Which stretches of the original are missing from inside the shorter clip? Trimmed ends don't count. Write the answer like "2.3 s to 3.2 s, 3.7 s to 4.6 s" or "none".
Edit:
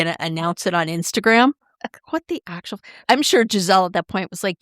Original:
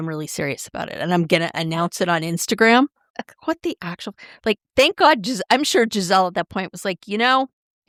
4.3 s to 5.4 s